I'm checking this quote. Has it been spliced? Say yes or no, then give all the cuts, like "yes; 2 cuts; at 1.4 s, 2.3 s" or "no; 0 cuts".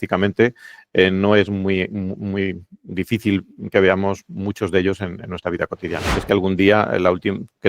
yes; 1 cut; at 6.1 s